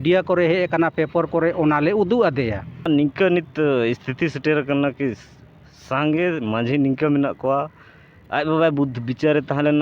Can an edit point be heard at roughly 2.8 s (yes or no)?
yes